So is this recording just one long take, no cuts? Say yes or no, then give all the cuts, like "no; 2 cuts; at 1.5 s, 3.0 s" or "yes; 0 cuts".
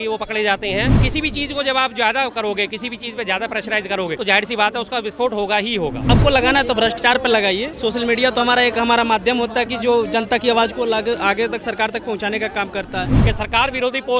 no; 5 cuts; at 1.0 s, 4.2 s, 6.1 s, 7.7 s, 13.1 s